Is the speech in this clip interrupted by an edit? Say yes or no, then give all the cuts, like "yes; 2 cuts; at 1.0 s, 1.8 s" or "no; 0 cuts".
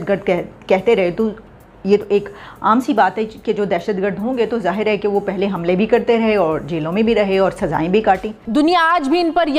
yes; 1 cut; at 8.4 s